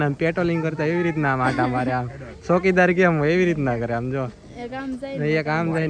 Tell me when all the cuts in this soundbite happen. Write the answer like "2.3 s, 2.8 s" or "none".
none